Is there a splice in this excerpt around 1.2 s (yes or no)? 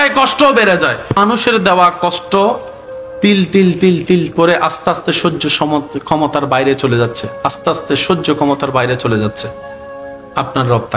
yes